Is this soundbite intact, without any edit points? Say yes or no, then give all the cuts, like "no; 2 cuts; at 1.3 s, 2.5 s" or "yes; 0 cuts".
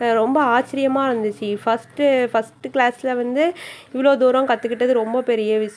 yes; 0 cuts